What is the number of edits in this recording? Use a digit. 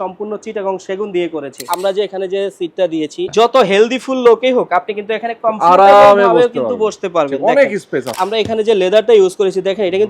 3